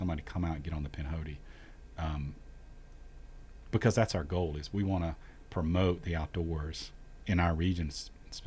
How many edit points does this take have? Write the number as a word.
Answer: zero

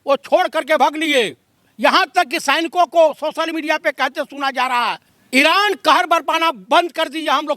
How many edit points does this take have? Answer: two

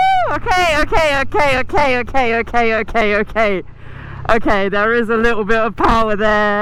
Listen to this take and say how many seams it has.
zero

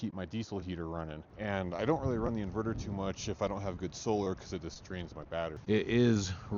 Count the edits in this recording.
two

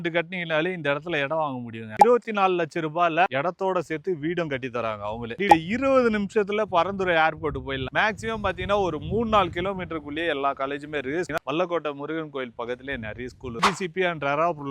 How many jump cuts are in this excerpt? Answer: five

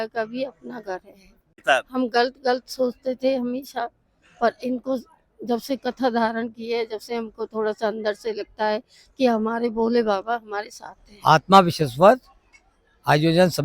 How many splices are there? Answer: two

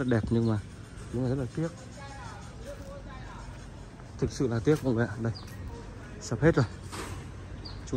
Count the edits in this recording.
zero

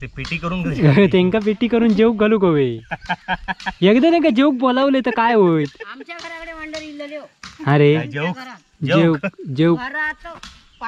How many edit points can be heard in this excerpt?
zero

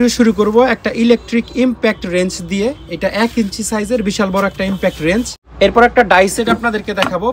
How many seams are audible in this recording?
one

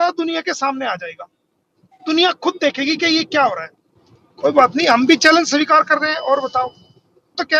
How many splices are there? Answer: one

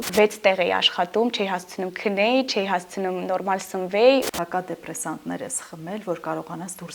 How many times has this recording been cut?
one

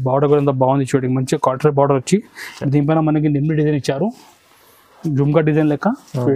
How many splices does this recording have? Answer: zero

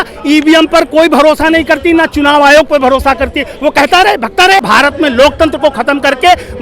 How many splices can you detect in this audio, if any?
one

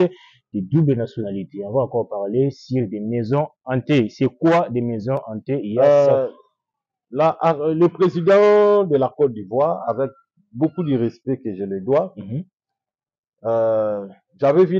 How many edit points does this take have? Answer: one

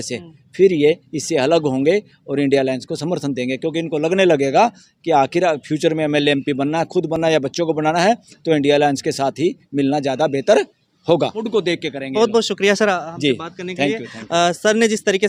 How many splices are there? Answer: zero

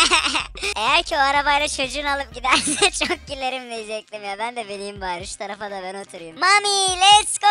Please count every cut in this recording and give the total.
one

